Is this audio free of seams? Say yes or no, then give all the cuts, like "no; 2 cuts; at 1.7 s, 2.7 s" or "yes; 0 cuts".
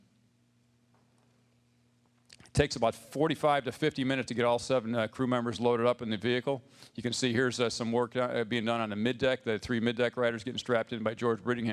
no; 1 cut; at 2.4 s